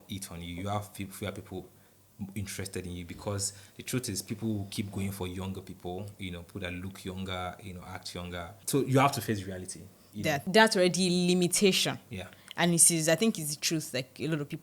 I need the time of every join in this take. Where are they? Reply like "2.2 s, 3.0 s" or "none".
8.6 s, 10.4 s